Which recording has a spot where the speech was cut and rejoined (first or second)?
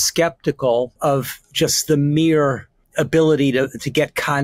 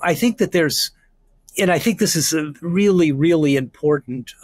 first